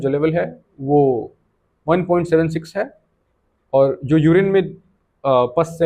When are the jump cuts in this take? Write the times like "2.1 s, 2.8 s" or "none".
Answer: none